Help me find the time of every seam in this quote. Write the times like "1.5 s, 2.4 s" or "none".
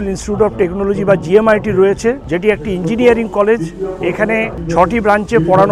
2.3 s, 4.6 s